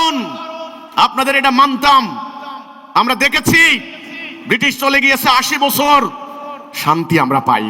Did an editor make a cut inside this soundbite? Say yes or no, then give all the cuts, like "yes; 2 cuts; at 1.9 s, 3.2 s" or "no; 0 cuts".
no; 0 cuts